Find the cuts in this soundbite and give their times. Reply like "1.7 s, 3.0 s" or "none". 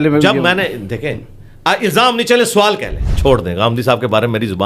3.1 s